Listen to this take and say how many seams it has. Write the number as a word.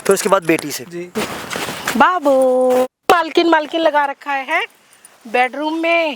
two